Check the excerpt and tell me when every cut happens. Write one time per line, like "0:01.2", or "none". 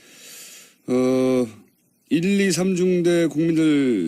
0:01.4